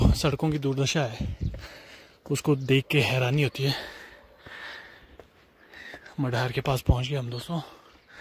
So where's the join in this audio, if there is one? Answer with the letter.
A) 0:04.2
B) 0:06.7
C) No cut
C